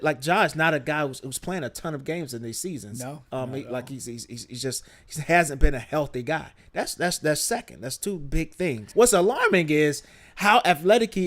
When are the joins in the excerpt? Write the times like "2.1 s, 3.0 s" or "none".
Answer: 8.8 s